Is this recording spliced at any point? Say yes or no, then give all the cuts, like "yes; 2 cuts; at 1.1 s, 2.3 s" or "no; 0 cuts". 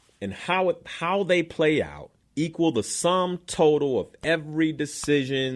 no; 0 cuts